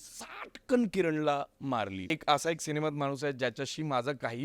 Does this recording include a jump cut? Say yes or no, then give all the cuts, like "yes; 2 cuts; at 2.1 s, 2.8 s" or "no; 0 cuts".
yes; 1 cut; at 2.1 s